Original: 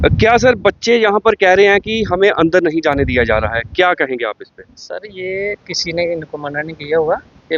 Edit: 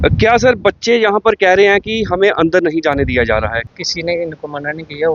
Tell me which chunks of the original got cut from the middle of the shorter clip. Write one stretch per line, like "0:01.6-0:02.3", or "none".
0:03.7-0:05.6